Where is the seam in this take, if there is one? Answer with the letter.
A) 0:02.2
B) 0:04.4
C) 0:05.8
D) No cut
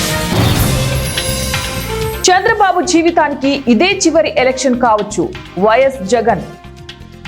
A